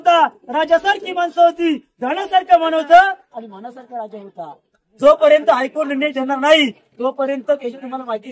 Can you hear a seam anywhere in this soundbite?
yes; 1 cut; at 4.8 s

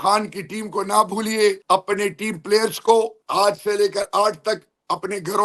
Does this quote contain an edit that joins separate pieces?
yes; 2 cuts; at 1.6 s, 3.2 s

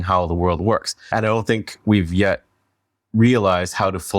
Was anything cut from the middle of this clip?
yes; 1 cut; at 1.1 s

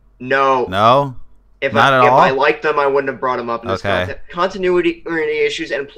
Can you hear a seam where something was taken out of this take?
yes; 1 cut; at 4.3 s

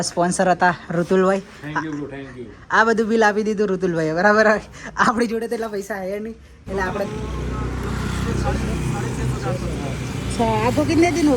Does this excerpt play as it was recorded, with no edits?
no; 1 cut; at 7.1 s

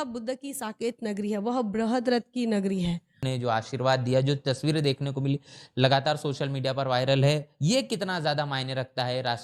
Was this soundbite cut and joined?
yes; 1 cut; at 3.2 s

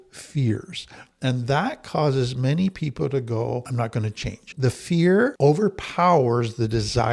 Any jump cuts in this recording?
yes; 2 cuts; at 3.7 s, 5.3 s

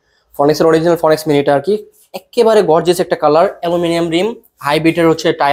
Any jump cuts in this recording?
no; 0 cuts

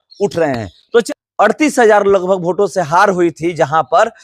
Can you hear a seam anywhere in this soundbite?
yes; 1 cut; at 1.1 s

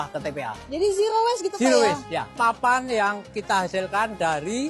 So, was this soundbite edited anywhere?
yes; 2 cuts; at 2.3 s, 3.3 s

